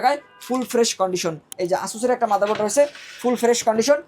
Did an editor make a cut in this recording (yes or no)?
yes